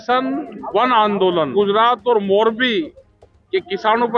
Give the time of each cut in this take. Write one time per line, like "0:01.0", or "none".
0:01.5